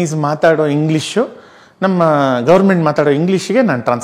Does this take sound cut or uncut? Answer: uncut